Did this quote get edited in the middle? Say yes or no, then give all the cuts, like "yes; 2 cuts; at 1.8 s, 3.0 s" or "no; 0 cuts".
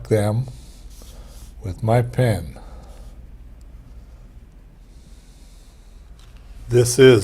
yes; 1 cut; at 5.9 s